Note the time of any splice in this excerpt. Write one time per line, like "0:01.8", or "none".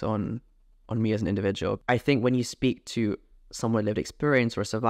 0:01.8

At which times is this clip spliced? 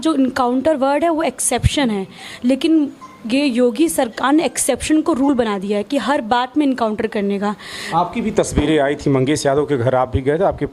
0:07.8

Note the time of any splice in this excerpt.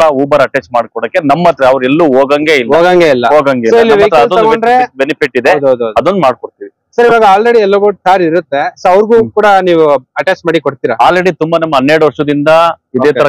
none

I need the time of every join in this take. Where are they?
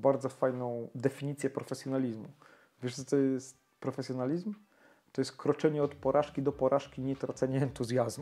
none

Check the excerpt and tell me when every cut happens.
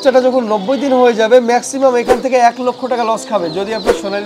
none

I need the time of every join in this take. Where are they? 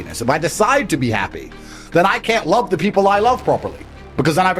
none

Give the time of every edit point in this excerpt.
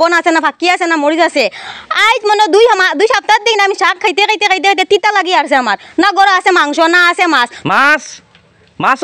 0:07.5

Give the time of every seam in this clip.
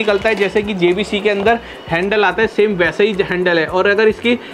none

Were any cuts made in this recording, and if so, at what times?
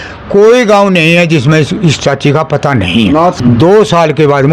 0:03.4

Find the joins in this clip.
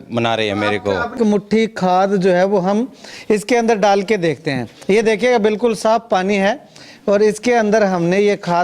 0:01.1

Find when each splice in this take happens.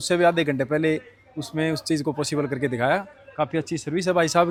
none

